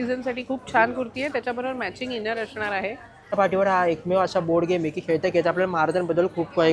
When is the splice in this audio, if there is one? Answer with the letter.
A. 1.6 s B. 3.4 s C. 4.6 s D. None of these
B